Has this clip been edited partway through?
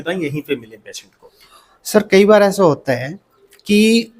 no; 0 cuts

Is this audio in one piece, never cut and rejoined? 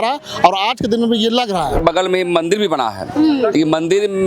no; 1 cut; at 1.8 s

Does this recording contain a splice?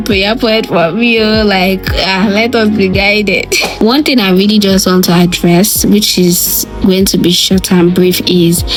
no; 0 cuts

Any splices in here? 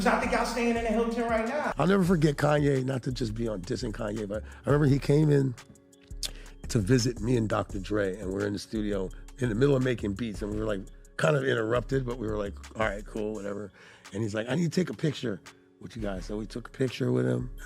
yes; 1 cut; at 1.7 s

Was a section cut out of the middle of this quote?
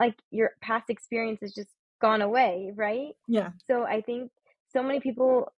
no; 0 cuts

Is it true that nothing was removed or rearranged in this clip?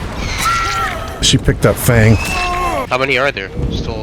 no; 2 cuts; at 1.2 s, 2.9 s

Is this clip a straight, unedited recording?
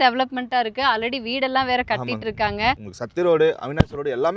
no; 1 cut; at 2.9 s

